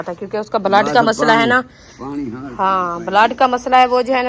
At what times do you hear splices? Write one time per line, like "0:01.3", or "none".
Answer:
none